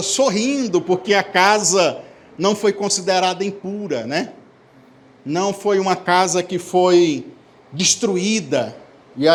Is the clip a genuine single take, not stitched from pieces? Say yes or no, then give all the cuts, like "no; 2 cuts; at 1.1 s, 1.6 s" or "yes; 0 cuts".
yes; 0 cuts